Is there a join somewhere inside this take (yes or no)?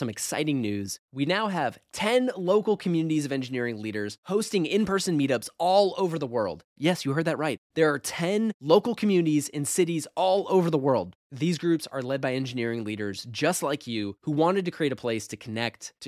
no